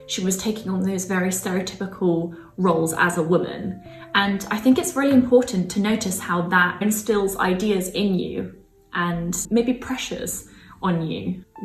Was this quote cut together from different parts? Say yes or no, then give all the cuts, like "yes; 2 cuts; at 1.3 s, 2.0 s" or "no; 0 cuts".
no; 0 cuts